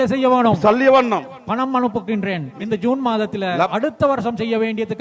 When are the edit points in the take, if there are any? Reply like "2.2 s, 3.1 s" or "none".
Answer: 2.5 s, 3.7 s

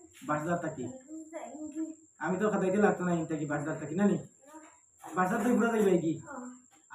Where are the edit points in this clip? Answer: none

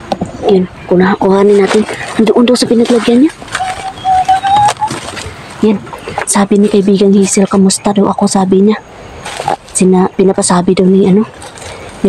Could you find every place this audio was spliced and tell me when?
none

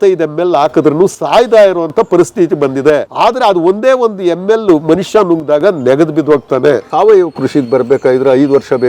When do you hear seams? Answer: 3.1 s, 6.9 s

